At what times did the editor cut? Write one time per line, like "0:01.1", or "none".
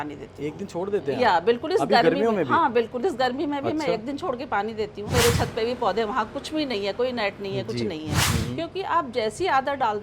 0:05.1
0:08.2